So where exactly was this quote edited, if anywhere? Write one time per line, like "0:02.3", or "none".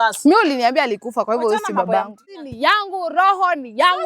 0:02.2

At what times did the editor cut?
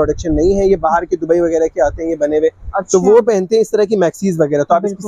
none

